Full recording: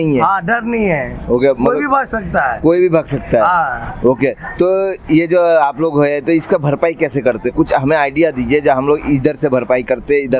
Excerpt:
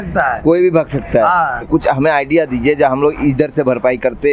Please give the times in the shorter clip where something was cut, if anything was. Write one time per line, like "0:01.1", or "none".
0:01.6

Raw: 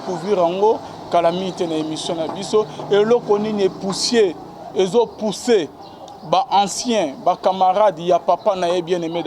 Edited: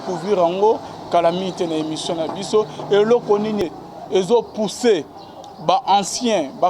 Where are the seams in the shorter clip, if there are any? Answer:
0:03.6

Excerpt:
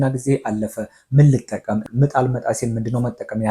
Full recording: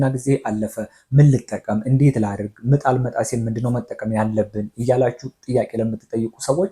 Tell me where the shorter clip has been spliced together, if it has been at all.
0:01.8

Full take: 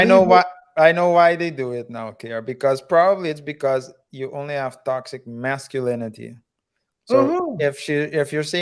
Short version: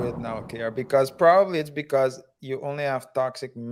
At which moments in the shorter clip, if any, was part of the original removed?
none

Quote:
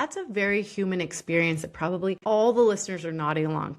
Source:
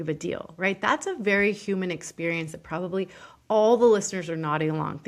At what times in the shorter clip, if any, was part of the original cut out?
0:02.2

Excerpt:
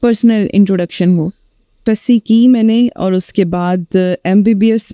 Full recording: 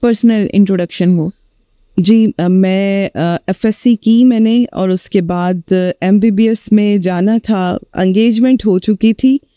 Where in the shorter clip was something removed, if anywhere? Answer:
0:01.7

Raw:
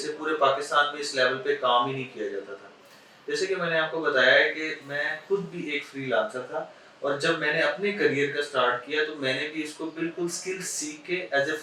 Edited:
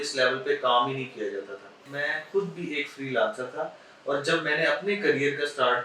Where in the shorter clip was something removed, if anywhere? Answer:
0:01.9

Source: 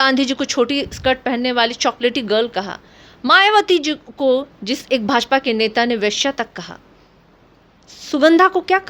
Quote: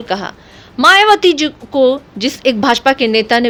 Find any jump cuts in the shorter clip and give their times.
none

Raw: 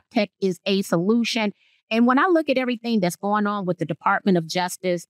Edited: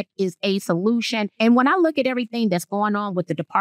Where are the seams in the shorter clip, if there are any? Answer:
0:01.3

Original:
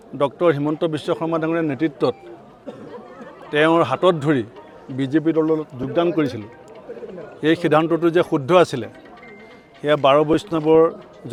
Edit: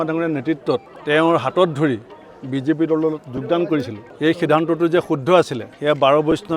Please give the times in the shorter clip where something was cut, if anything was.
0:00.9
0:04.0
0:05.6

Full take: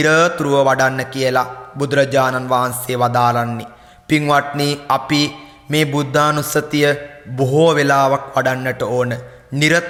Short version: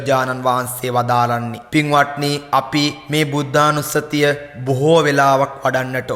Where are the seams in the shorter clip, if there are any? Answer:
0:01.6
0:03.0
0:04.5

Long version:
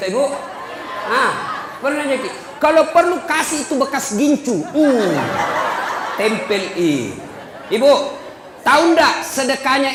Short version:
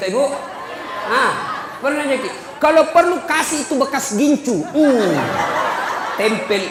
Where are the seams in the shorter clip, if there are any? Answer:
none

